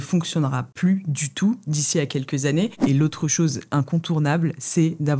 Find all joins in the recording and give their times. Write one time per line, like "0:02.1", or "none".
0:02.7